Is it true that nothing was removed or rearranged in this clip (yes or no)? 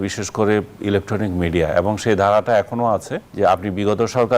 no